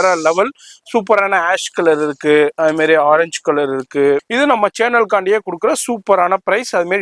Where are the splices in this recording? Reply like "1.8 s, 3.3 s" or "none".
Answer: 4.3 s